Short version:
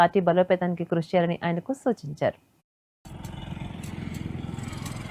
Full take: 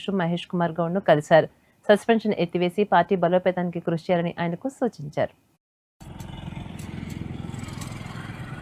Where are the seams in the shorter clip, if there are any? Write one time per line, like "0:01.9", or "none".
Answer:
none